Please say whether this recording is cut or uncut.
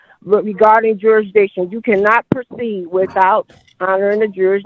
uncut